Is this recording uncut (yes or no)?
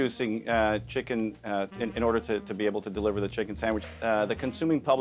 no